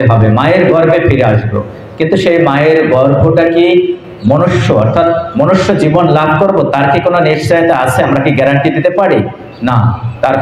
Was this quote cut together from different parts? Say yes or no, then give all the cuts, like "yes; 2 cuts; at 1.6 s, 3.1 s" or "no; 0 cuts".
no; 0 cuts